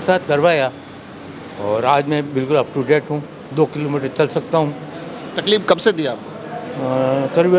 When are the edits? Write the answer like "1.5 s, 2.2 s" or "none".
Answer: none